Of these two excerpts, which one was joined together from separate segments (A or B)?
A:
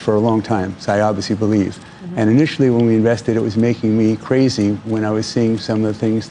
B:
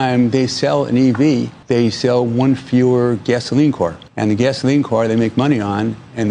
B